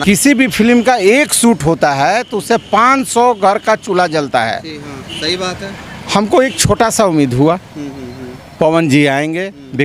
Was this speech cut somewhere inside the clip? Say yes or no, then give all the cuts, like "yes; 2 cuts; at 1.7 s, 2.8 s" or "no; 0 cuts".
no; 0 cuts